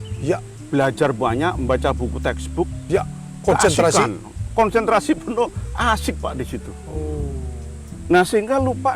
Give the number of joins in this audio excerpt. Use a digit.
0